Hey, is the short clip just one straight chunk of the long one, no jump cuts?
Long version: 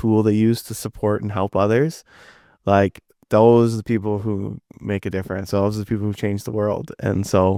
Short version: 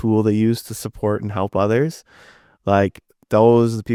yes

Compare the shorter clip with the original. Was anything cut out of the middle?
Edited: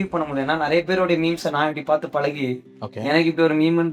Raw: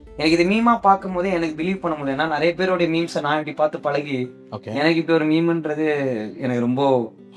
no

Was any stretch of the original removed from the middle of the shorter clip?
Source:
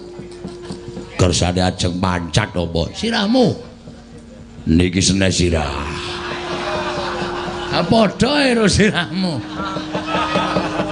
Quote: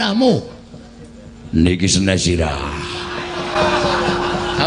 no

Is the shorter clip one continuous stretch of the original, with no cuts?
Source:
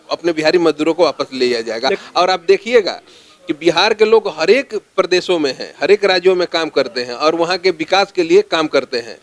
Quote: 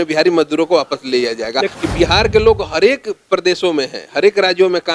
no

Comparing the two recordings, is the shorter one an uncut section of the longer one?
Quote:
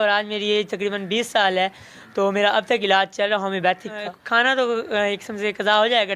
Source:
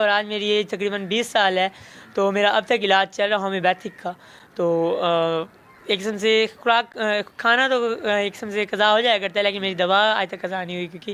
no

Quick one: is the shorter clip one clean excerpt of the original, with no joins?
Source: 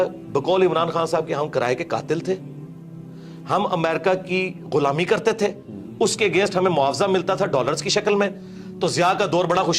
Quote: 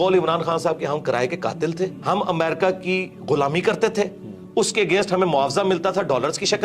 no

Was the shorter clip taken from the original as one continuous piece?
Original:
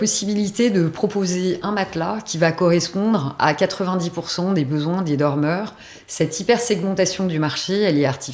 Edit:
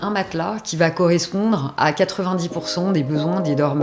yes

